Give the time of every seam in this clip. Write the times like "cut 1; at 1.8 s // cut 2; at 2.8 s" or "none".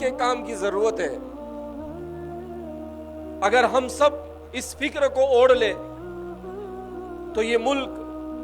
cut 1; at 1.2 s // cut 2; at 3.4 s